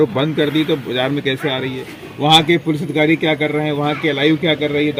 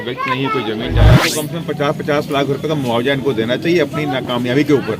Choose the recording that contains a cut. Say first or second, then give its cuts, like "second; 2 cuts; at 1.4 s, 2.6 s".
second; 1 cut; at 1.2 s